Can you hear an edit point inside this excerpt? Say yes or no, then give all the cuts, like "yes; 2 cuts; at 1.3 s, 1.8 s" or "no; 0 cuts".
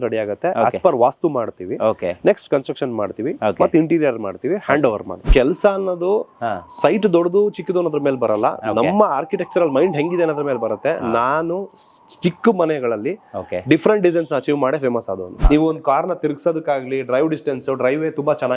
yes; 2 cuts; at 5.2 s, 15.4 s